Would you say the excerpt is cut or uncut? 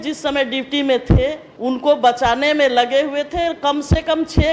cut